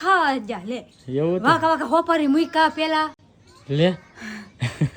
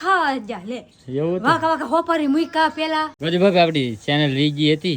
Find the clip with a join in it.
second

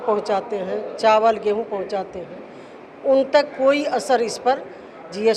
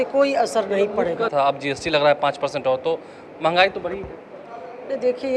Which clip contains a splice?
second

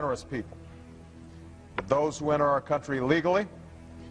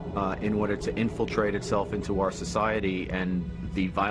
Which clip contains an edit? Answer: second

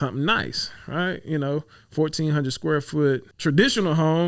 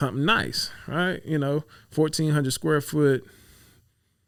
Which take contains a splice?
first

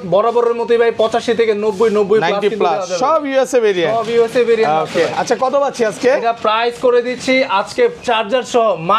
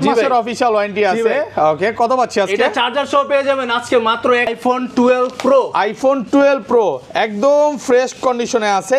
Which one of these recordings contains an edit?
second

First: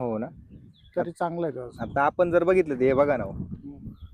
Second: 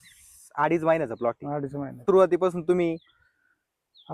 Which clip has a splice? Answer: second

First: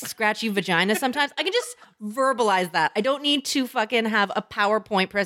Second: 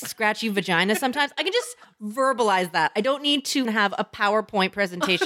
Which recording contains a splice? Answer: second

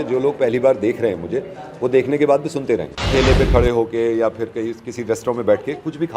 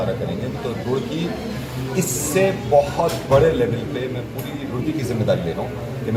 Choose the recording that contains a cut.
first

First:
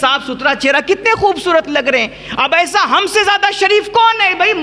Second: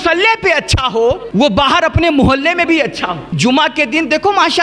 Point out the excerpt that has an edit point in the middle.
second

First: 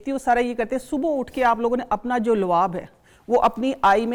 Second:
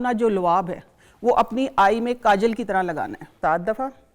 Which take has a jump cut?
second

